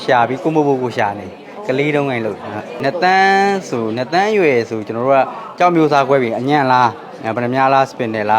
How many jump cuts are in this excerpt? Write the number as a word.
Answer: one